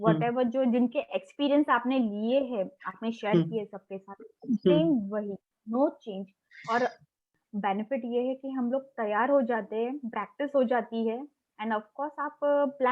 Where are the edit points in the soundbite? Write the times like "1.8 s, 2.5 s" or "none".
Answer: 7.2 s